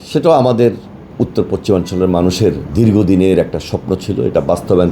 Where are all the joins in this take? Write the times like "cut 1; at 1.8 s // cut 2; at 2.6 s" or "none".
cut 1; at 1.1 s